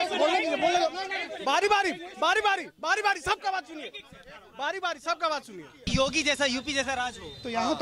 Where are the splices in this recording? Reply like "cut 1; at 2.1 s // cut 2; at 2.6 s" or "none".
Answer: cut 1; at 5.8 s